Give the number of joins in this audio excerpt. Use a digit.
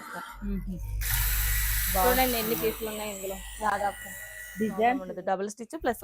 1